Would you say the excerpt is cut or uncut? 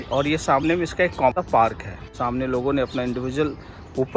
cut